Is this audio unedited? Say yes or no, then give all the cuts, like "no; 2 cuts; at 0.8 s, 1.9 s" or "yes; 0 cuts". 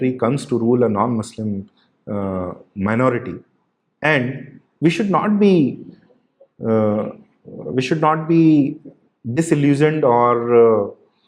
yes; 0 cuts